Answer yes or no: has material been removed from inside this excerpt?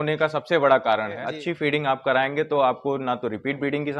yes